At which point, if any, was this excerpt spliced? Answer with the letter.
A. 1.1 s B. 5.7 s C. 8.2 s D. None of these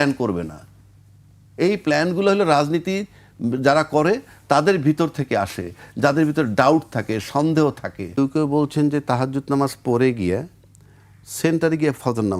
C